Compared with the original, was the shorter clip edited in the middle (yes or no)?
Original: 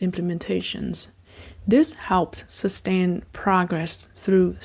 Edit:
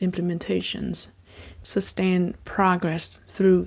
yes